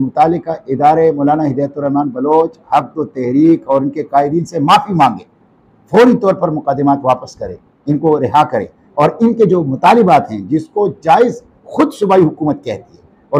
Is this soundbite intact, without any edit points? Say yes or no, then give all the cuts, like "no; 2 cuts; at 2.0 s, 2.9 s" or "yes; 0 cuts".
yes; 0 cuts